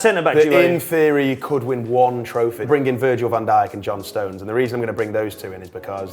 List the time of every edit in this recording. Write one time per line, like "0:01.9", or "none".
0:02.7